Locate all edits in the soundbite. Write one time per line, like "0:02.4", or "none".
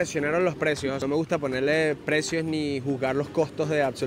0:01.0